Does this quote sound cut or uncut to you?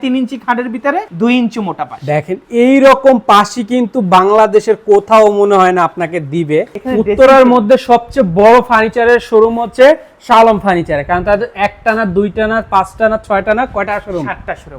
cut